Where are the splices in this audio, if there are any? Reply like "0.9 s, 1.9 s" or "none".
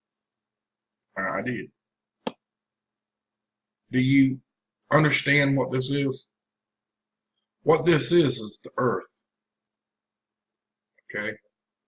1.4 s

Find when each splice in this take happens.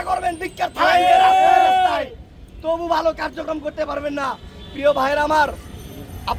none

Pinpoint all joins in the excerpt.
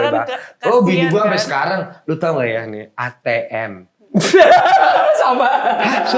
none

